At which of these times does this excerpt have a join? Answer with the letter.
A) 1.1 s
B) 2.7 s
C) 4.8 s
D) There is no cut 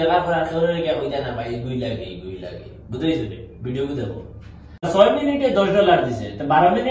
C